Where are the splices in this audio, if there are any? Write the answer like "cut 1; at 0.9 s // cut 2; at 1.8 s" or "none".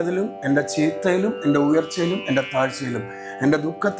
none